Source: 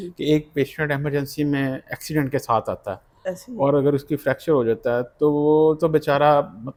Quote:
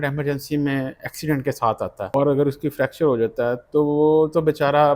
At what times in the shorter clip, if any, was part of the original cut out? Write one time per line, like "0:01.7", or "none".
0:02.1